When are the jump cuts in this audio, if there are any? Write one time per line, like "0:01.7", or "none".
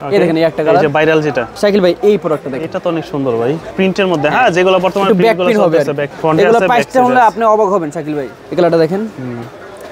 0:01.5
0:03.7
0:06.1
0:08.3